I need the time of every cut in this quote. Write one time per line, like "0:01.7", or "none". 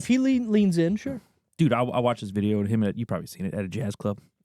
none